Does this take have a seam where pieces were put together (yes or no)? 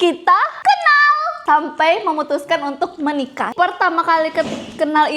yes